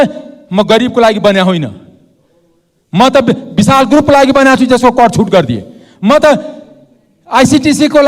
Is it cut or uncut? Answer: uncut